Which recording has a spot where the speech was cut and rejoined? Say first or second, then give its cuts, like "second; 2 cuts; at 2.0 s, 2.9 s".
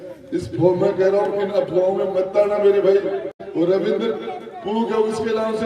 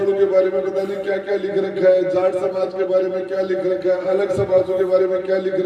first; 1 cut; at 3.4 s